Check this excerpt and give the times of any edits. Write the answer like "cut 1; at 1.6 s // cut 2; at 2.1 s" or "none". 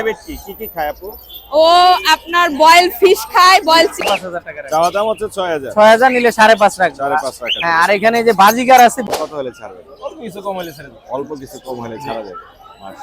cut 1; at 4.0 s // cut 2; at 9.0 s